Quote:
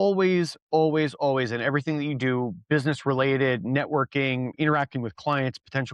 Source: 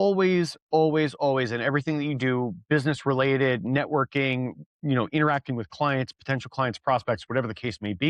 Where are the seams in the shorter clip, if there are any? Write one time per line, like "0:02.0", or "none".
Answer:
0:04.5